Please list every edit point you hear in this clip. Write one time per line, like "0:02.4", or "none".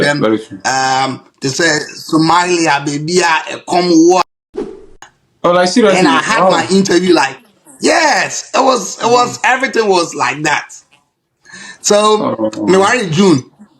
0:04.7